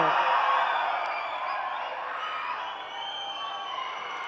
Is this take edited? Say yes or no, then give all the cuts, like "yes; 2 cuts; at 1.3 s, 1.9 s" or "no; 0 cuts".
no; 0 cuts